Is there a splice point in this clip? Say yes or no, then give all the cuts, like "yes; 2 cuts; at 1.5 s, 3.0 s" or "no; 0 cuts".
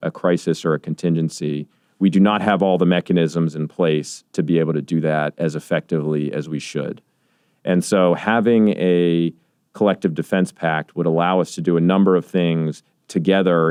no; 0 cuts